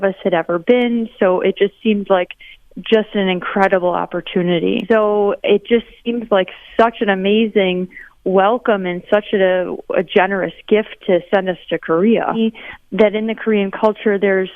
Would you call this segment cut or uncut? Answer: cut